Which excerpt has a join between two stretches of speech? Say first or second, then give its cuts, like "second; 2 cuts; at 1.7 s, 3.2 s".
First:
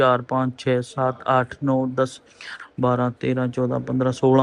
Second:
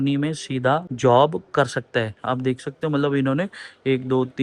second; 1 cut; at 0.9 s